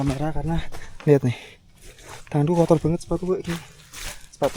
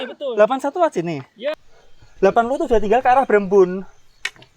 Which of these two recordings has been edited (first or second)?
second